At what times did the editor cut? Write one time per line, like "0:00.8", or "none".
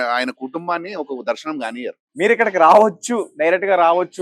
0:02.0